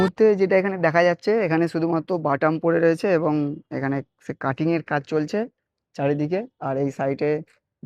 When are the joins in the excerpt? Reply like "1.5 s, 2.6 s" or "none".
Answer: none